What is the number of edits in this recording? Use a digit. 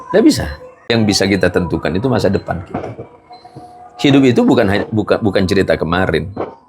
1